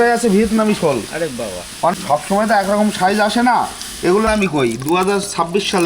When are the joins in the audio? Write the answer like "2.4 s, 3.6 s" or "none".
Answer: 1.9 s, 4.2 s